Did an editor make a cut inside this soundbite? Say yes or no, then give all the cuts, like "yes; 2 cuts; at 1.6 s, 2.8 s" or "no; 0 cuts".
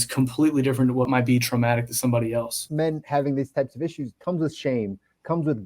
yes; 3 cuts; at 1.1 s, 2.6 s, 4.1 s